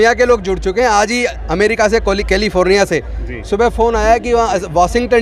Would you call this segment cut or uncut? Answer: uncut